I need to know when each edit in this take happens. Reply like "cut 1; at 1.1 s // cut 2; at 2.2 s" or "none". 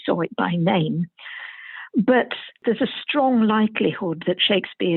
cut 1; at 2.6 s